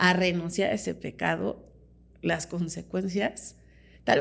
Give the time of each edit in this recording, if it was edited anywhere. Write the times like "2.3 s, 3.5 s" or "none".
none